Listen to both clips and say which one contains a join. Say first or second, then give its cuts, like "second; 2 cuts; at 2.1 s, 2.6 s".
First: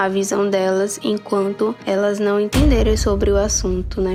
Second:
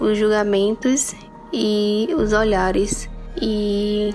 second; 1 cut; at 3.2 s